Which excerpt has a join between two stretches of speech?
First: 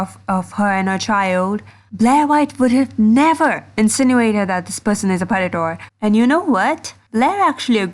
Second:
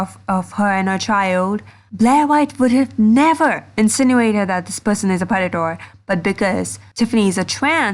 first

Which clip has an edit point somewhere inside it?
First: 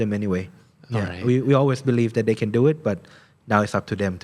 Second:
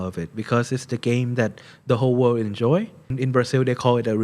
second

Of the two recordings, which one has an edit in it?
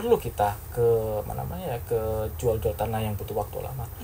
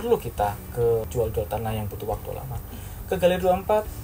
second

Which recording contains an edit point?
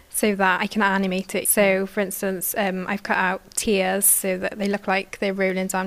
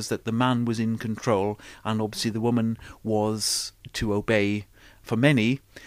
second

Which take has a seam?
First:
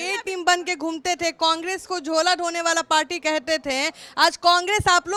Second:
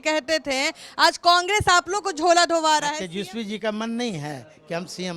second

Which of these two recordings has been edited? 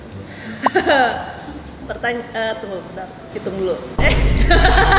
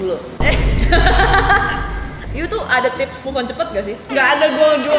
second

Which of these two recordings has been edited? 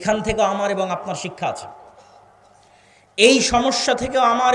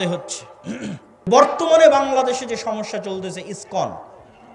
second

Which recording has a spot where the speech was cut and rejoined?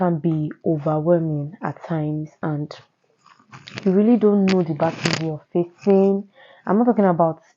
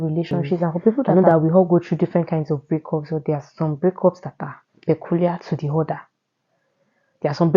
second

